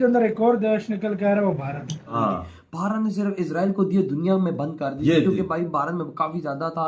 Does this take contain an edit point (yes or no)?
yes